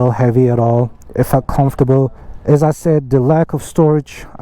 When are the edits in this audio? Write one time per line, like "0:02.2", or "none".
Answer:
0:02.3